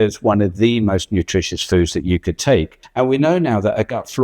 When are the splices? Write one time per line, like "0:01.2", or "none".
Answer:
0:02.8